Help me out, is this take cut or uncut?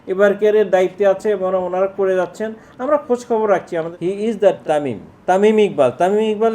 cut